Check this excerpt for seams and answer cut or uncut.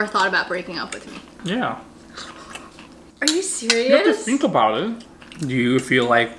cut